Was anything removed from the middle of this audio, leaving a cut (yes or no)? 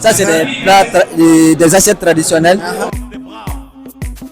yes